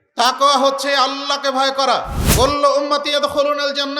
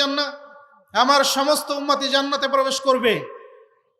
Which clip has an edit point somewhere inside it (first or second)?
first